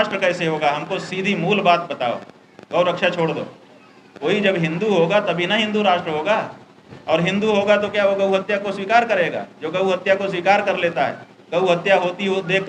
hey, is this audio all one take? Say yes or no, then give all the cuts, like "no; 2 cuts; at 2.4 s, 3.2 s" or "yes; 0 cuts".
yes; 0 cuts